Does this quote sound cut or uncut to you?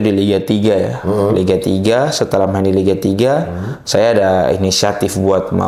uncut